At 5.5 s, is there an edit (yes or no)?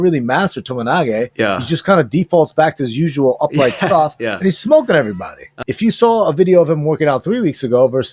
yes